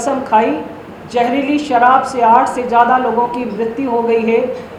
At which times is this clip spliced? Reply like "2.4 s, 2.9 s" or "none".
none